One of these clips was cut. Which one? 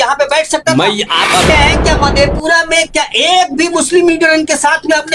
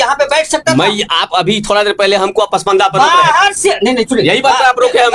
first; 1 cut; at 1.5 s

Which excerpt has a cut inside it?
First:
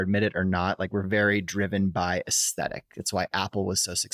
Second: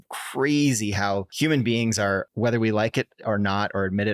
second; 2 cuts; at 1.3 s, 2.2 s

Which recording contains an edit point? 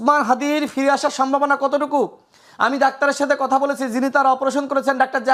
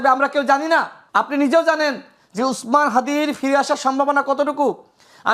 second; 1 cut; at 1.0 s

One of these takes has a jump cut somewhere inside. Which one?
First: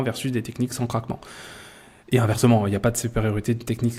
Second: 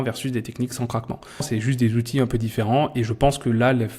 second; 1 cut; at 1.5 s

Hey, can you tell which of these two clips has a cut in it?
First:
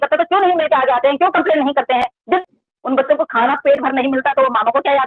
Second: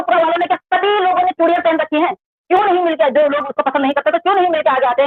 first; 1 cut; at 2.4 s

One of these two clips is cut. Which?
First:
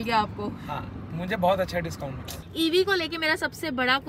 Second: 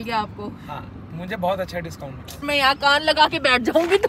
second; 1 cut; at 2.4 s

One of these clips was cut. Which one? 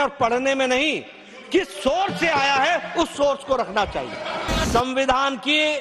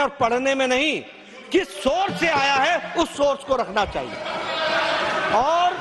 first; 1 cut; at 4.7 s

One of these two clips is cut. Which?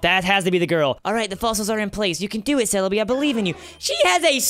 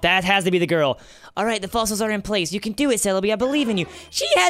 first; 1 cut; at 1.0 s

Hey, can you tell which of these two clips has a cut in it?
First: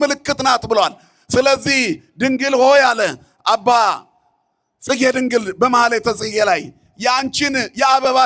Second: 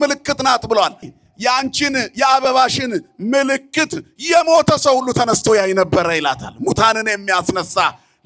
second; 1 cut; at 1.1 s

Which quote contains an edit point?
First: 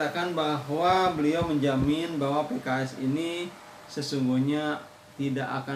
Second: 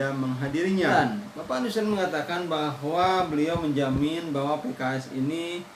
second; 1 cut; at 0.9 s

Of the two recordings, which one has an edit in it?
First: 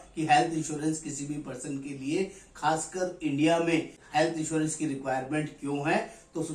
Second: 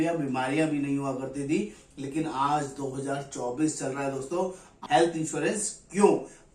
second; 1 cut; at 4.7 s

